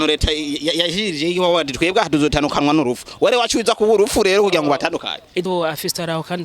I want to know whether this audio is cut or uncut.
cut